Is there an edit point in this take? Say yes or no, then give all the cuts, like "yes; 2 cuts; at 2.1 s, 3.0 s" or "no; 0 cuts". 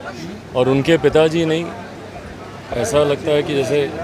no; 0 cuts